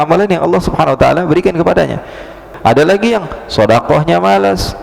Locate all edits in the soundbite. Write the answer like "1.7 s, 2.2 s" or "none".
2.5 s